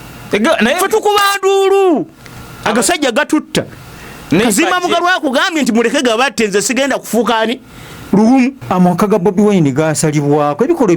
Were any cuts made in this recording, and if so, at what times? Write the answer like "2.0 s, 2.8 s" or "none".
8.6 s